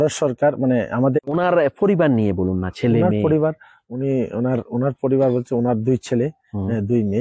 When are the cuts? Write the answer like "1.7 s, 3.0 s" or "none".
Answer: 1.2 s